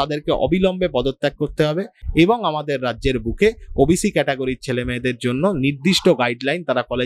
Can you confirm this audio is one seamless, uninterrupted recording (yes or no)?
yes